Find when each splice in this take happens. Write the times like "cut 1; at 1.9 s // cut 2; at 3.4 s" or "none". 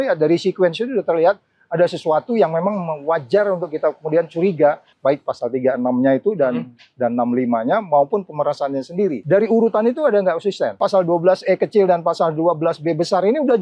cut 1; at 4.9 s // cut 2; at 9.2 s // cut 3; at 10.8 s